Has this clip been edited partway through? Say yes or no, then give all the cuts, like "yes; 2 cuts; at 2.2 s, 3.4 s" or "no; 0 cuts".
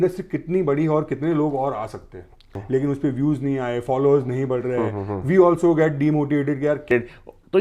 yes; 2 cuts; at 2.5 s, 6.9 s